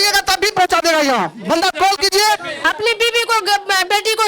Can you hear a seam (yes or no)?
yes